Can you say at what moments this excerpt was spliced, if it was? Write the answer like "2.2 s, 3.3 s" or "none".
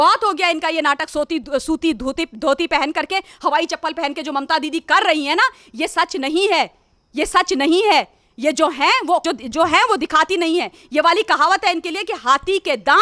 none